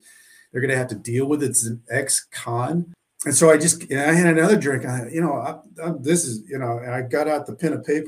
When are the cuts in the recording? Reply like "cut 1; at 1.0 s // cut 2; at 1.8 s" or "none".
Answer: cut 1; at 3.0 s